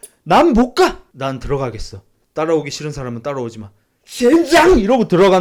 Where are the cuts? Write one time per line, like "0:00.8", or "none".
none